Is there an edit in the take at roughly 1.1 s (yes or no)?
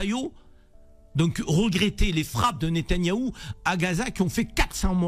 no